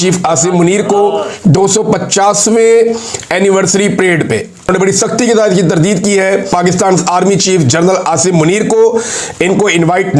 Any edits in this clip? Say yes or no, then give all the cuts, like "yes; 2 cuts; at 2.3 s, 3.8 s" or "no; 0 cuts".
yes; 2 cuts; at 4.7 s, 6.5 s